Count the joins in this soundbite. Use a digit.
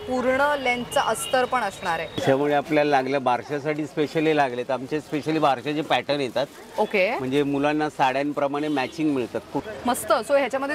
2